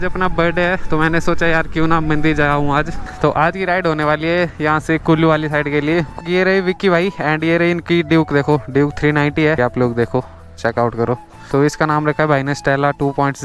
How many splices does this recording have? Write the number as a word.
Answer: four